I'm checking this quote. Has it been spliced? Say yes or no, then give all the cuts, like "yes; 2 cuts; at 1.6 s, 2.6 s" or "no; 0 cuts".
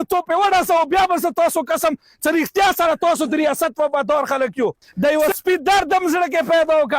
yes; 1 cut; at 4.9 s